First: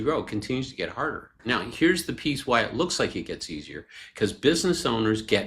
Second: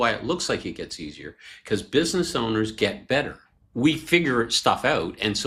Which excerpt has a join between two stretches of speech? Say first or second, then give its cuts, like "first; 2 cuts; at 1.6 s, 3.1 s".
first; 1 cut; at 1.4 s